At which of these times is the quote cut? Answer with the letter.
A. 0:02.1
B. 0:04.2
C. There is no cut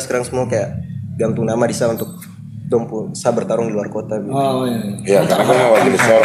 C